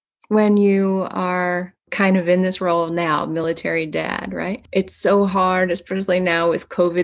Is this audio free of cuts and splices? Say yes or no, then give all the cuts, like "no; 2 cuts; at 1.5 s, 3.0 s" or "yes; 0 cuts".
no; 2 cuts; at 1.9 s, 4.6 s